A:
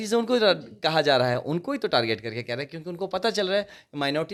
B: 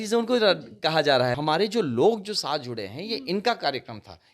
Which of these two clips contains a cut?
B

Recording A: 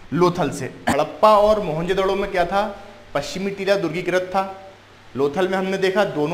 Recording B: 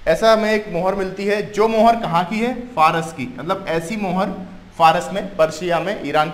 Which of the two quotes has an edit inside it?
A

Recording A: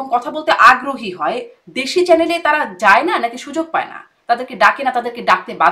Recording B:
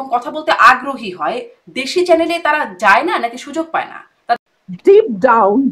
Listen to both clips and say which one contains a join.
B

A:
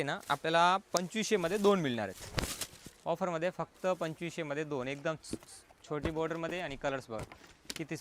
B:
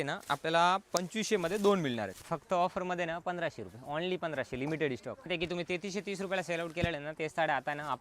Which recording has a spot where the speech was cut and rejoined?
B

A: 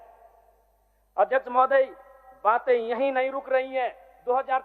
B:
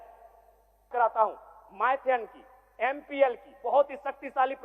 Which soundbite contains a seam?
B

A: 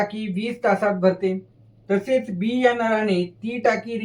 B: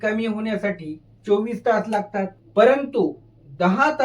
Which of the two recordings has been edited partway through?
B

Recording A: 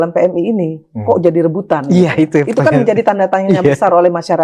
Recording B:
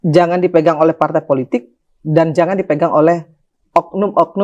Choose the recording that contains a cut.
A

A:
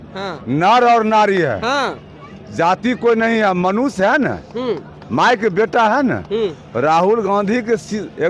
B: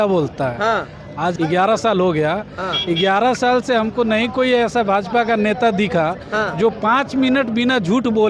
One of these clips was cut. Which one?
B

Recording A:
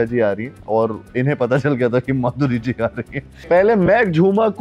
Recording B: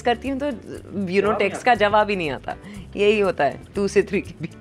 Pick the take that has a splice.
A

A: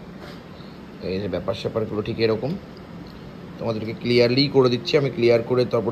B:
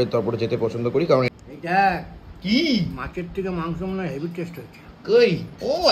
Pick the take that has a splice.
B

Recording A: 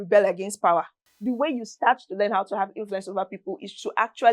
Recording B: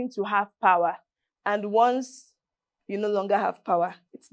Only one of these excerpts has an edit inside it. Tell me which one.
A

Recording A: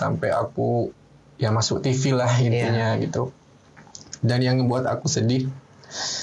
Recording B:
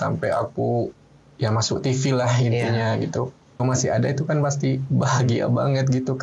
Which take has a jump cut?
B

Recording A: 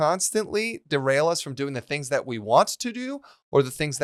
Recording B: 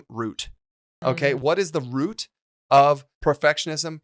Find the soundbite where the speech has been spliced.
B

